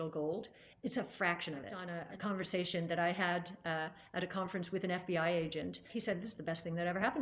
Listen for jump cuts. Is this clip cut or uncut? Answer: cut